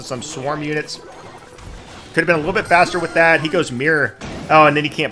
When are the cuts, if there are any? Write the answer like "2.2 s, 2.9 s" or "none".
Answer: none